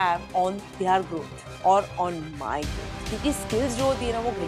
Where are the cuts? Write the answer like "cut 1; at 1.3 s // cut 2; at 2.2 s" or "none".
cut 1; at 3.0 s